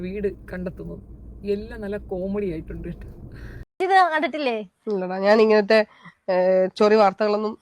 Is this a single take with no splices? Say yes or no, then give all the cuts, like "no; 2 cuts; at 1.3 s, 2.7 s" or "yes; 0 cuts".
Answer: no; 1 cut; at 3.8 s